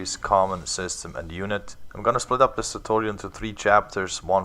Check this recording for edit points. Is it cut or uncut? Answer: cut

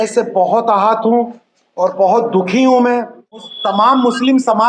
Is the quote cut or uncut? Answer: cut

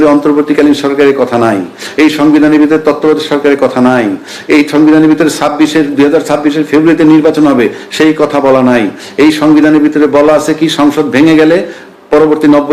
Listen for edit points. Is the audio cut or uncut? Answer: uncut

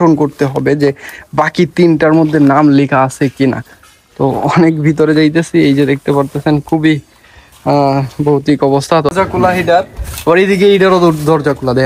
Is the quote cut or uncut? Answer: uncut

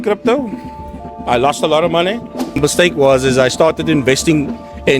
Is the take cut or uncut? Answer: cut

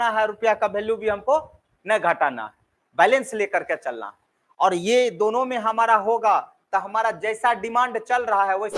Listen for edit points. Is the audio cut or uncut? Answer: uncut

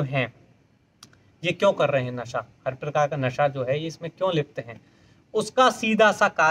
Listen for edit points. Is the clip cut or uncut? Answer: uncut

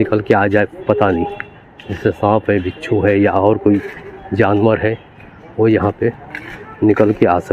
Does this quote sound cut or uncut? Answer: uncut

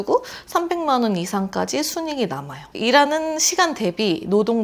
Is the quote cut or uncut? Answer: uncut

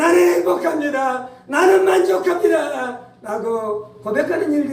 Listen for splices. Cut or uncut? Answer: uncut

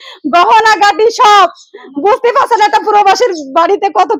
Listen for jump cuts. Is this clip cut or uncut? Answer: uncut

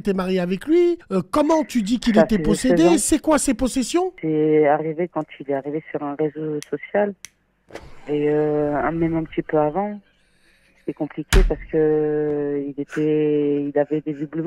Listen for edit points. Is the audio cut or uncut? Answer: cut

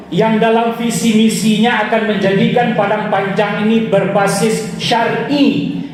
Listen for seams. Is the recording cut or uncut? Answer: uncut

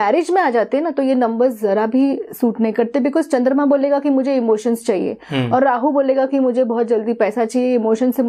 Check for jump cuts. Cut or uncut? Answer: uncut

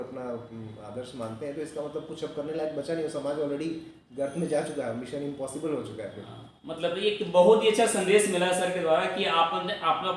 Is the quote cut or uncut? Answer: uncut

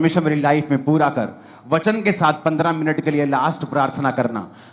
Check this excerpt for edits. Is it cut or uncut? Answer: uncut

